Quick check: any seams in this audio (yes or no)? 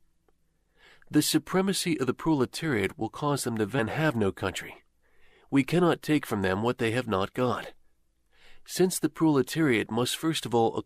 no